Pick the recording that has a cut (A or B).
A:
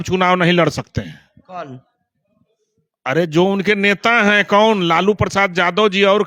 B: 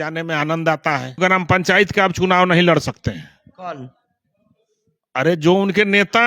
B